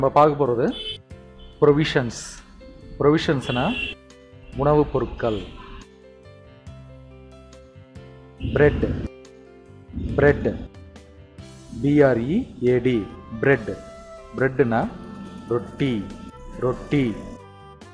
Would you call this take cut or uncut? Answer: uncut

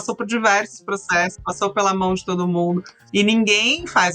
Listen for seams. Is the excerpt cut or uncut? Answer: cut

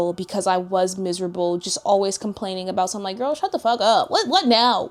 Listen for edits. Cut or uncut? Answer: uncut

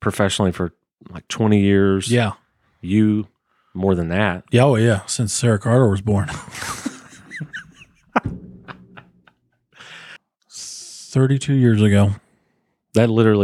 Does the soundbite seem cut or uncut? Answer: cut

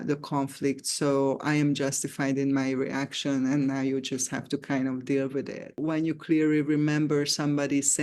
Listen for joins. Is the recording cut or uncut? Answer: cut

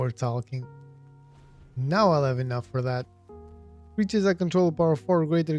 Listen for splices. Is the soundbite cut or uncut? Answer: uncut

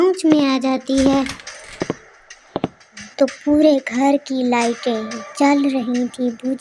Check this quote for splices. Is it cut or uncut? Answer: cut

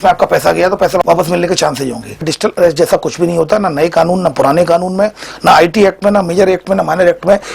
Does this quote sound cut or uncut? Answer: cut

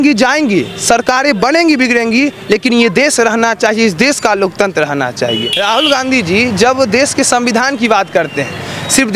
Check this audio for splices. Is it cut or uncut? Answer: cut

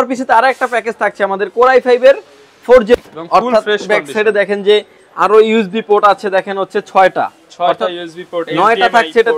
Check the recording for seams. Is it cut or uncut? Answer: cut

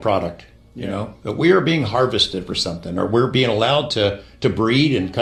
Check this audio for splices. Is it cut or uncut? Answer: uncut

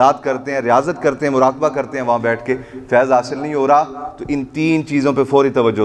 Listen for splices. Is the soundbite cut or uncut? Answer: uncut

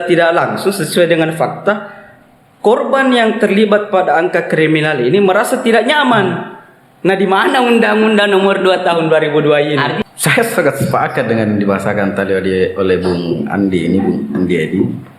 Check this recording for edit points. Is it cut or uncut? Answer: cut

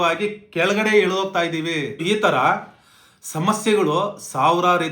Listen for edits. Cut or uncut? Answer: cut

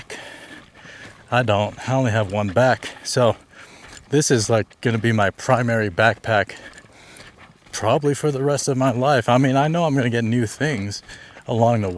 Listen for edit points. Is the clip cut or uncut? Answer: uncut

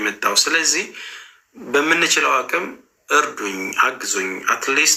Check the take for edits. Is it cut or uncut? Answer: uncut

